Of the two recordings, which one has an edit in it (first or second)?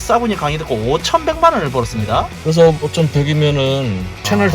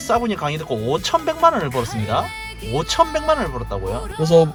first